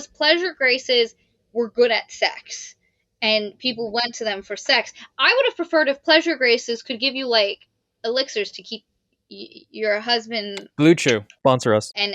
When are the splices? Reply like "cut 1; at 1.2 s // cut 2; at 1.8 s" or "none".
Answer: none

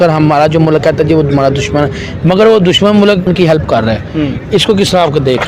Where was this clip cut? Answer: cut 1; at 3.3 s

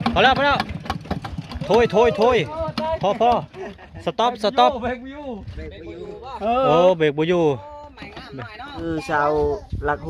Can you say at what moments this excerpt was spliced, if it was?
cut 1; at 8.8 s

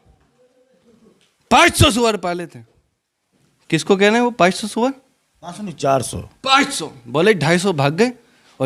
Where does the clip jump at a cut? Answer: none

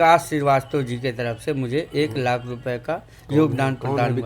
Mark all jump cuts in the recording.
none

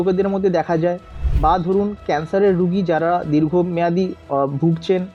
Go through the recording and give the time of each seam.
none

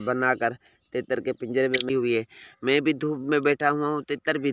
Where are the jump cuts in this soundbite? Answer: cut 1; at 1.9 s

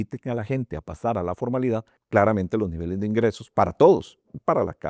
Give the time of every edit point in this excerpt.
cut 1; at 2.0 s

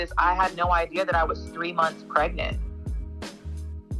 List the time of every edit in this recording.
cut 1; at 2.8 s

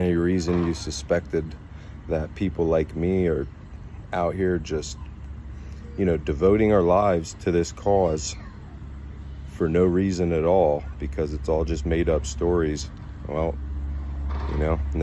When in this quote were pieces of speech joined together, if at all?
none

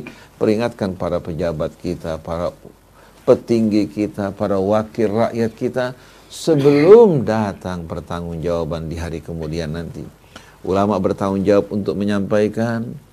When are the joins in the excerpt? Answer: none

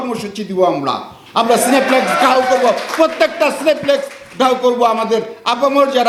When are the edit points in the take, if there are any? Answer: none

